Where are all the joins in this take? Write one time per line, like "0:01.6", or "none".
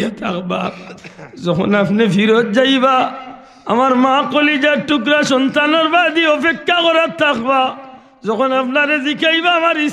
none